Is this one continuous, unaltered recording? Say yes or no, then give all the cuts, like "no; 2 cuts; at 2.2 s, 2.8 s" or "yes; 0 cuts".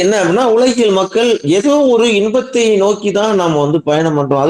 yes; 0 cuts